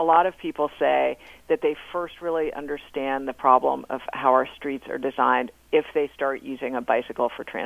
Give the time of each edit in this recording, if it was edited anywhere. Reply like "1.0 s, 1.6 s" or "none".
none